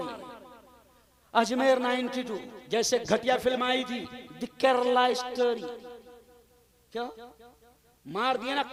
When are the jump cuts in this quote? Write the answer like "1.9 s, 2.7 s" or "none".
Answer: none